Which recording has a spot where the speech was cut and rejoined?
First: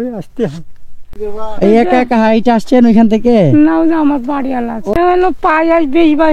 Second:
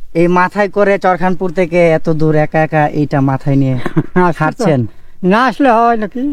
first; 2 cuts; at 1.1 s, 5.0 s

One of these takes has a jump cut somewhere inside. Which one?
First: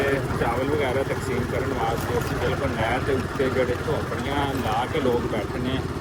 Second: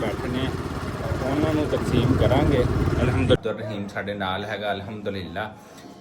second; 1 cut; at 3.4 s

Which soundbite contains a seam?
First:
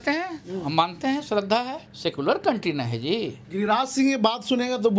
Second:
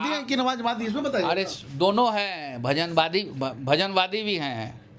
first; 1 cut; at 1.8 s

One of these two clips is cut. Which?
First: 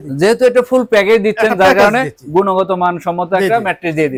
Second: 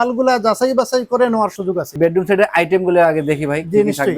second; 1 cut; at 1.9 s

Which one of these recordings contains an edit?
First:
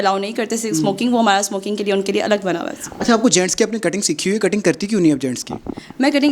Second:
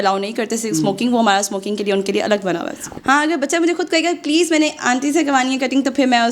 second; 1 cut; at 2.8 s

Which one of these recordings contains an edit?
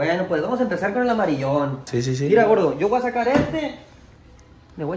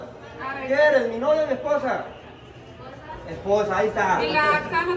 first; 1 cut; at 1.9 s

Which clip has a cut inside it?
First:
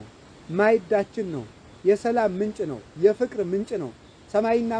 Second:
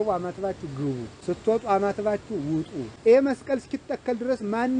second; 2 cuts; at 1.1 s, 2.8 s

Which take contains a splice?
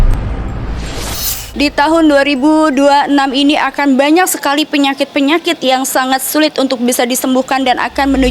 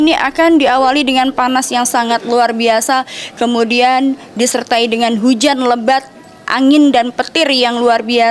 first; 1 cut; at 1.4 s

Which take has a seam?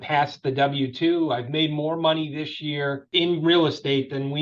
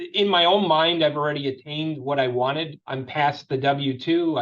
first; 1 cut; at 3.0 s

